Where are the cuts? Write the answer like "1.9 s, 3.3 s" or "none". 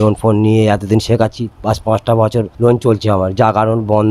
2.5 s